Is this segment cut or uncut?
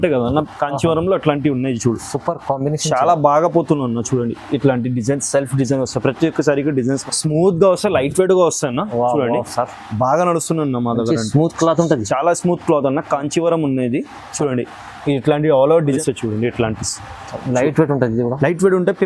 cut